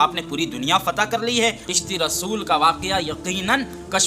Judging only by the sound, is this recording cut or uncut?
cut